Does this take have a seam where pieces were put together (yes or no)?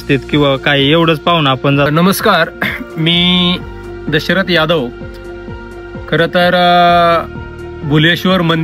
yes